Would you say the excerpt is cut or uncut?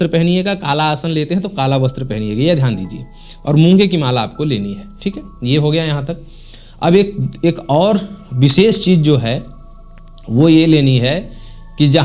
uncut